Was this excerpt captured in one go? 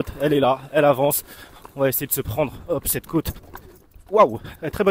yes; 0 cuts

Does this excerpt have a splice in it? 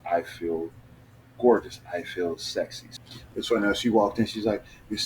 yes; 1 cut; at 2.8 s

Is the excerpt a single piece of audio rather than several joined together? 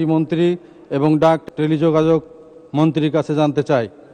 no; 1 cut; at 1.5 s

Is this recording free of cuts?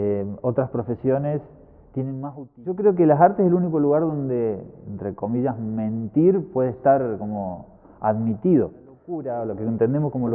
no; 2 cuts; at 2.2 s, 9.1 s

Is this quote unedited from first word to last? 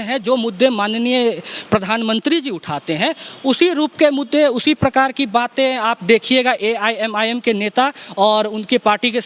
yes; 0 cuts

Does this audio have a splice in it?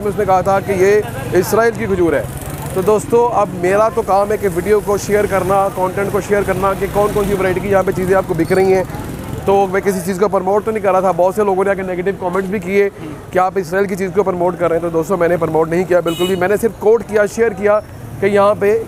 no; 0 cuts

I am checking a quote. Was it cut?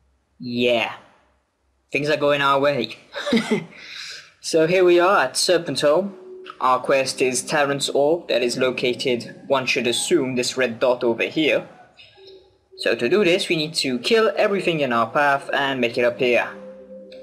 no; 0 cuts

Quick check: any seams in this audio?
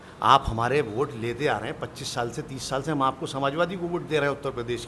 no; 0 cuts

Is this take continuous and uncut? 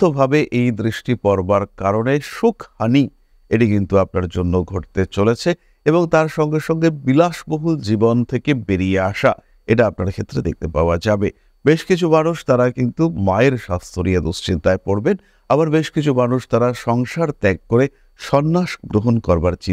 yes; 0 cuts

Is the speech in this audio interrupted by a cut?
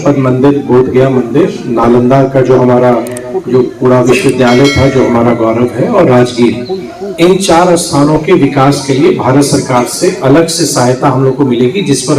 no; 0 cuts

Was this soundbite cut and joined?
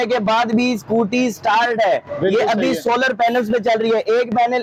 no; 0 cuts

